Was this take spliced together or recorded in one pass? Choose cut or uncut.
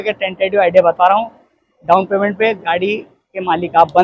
uncut